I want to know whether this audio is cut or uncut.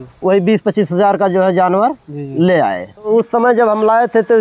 cut